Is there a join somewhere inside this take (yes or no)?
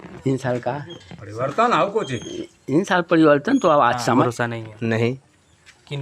yes